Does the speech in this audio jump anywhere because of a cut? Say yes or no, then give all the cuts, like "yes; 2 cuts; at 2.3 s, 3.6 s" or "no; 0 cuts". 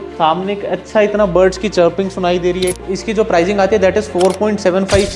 yes; 1 cut; at 2.8 s